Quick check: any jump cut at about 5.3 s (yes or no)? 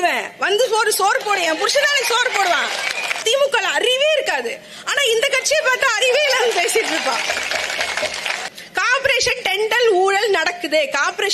no